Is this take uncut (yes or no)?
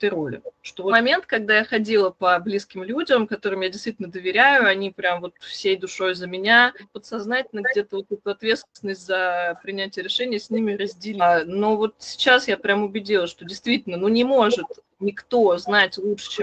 no